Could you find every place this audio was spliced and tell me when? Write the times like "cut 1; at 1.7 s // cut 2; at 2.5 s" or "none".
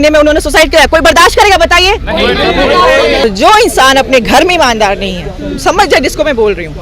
cut 1; at 3.2 s